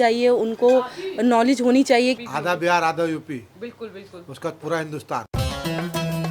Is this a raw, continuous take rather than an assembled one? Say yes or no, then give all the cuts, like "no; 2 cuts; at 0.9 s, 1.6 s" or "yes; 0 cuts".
no; 2 cuts; at 2.2 s, 5.3 s